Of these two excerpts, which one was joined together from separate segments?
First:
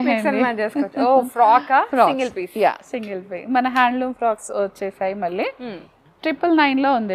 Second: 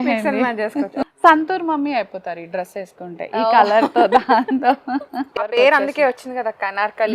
second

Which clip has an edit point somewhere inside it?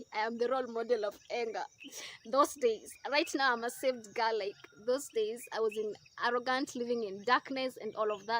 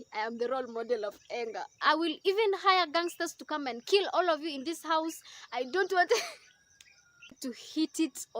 second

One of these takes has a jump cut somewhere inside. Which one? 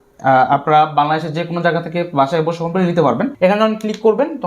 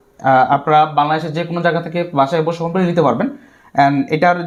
first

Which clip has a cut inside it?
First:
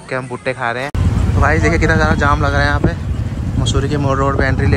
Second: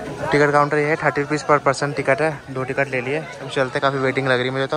first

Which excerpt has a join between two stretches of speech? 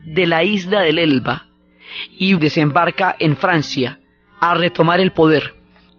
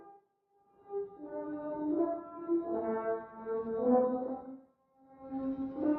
first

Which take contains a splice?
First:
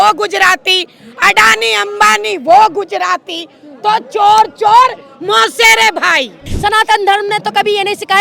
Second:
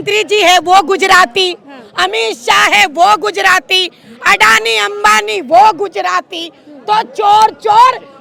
first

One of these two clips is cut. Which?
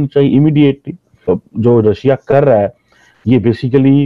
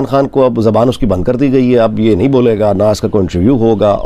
first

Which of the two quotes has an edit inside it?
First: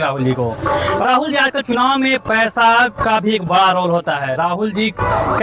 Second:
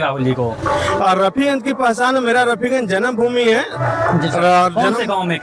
first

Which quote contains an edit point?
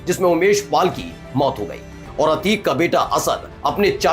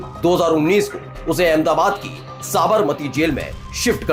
first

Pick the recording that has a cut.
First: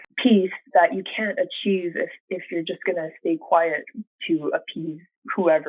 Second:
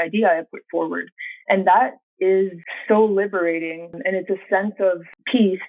second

